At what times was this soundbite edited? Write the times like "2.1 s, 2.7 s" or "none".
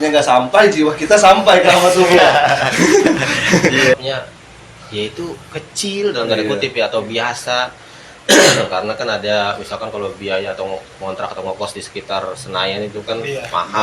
3.9 s